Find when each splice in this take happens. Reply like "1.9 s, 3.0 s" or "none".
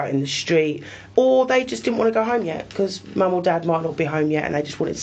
1.0 s